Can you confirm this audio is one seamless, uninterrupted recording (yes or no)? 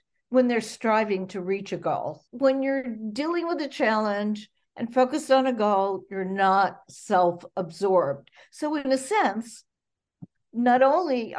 no